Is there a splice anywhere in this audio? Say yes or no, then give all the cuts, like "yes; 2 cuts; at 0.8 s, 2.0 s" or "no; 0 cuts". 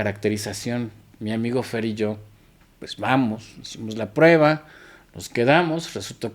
no; 0 cuts